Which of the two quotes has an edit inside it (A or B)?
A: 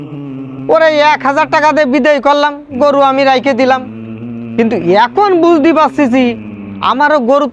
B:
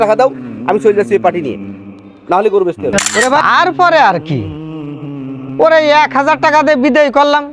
B